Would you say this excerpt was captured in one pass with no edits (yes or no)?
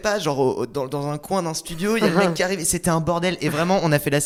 yes